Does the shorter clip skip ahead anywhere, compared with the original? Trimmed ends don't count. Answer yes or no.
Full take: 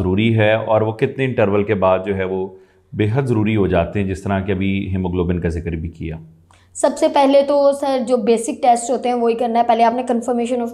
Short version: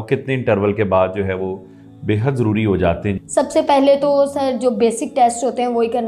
yes